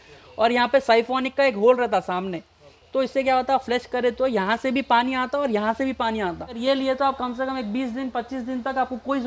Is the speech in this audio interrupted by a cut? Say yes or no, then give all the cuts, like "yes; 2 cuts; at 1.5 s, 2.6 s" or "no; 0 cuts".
yes; 1 cut; at 6.6 s